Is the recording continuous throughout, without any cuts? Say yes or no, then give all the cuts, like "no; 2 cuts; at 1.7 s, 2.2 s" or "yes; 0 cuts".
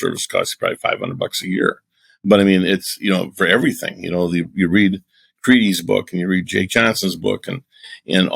yes; 0 cuts